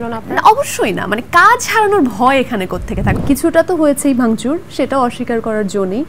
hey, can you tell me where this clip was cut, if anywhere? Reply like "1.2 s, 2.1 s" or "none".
3.1 s